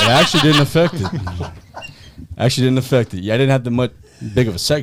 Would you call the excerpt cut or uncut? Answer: uncut